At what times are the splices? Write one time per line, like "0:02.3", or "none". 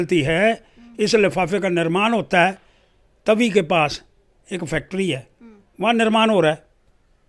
none